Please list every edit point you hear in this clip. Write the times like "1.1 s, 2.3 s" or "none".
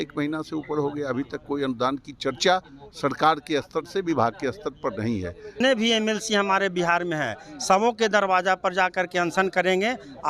5.6 s